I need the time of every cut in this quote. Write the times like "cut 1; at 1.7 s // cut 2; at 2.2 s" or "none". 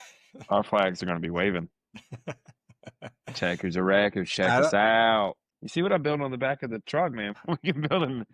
cut 1; at 5.4 s // cut 2; at 7.3 s